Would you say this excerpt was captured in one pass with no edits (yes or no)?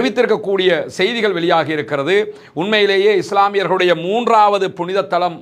yes